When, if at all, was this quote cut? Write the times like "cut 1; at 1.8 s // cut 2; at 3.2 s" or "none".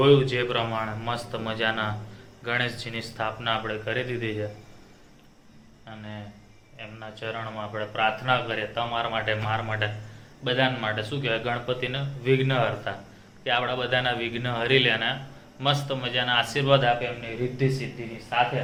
none